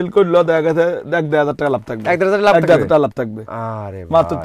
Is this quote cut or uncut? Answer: uncut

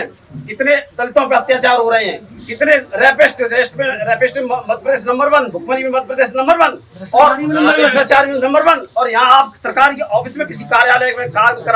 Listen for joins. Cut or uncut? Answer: uncut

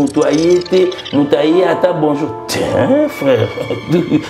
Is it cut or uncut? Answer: uncut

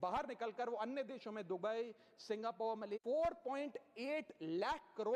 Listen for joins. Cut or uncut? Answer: cut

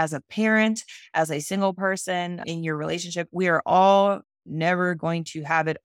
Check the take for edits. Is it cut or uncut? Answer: uncut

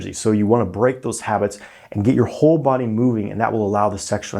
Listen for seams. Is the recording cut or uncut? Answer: uncut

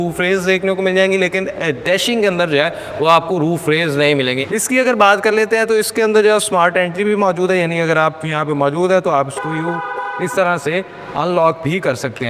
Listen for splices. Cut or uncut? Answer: uncut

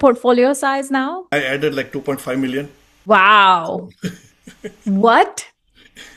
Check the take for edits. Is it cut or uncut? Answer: cut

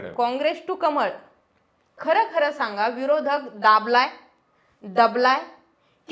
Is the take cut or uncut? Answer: cut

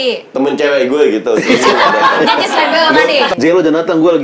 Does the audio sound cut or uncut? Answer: cut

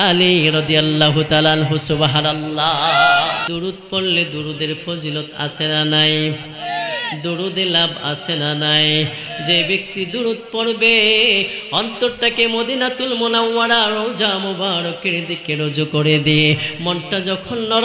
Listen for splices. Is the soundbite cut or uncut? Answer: cut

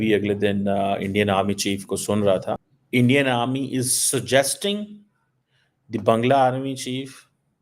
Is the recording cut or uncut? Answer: cut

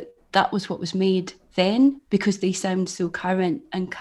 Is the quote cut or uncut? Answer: uncut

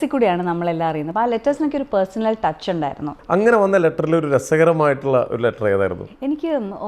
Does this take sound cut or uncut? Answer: cut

